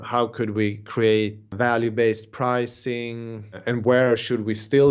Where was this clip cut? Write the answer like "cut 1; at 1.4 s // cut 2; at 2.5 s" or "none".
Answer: cut 1; at 1.5 s // cut 2; at 3.6 s